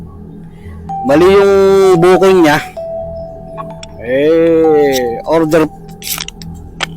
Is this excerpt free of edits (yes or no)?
no